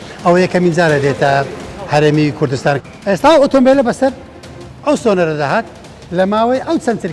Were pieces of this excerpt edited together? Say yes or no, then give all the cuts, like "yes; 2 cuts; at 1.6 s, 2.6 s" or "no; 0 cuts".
yes; 1 cut; at 2.8 s